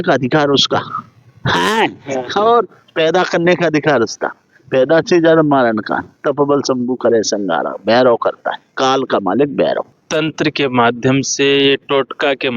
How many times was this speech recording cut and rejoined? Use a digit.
1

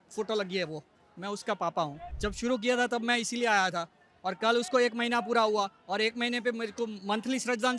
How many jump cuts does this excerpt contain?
1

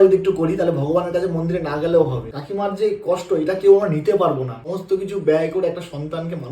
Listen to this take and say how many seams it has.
2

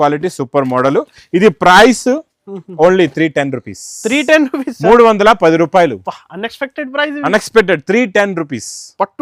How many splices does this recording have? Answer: 0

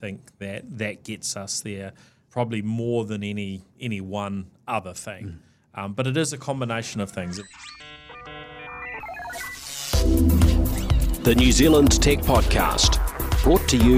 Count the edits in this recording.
1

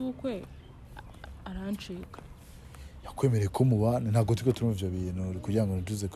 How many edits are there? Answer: 0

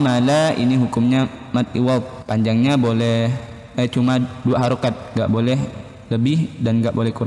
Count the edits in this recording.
1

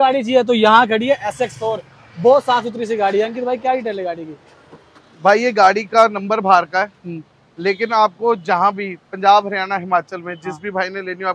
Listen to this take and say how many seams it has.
0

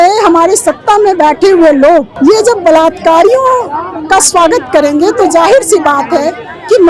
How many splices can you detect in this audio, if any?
1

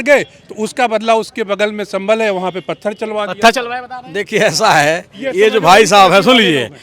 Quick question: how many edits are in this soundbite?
0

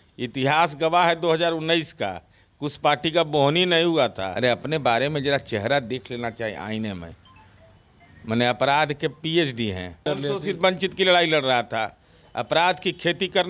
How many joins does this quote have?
2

